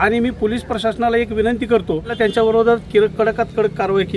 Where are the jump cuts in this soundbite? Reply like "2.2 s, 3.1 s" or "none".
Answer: 2.1 s